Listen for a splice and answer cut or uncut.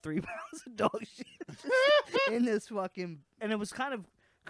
cut